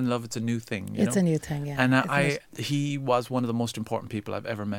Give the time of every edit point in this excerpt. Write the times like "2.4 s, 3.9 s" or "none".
2.5 s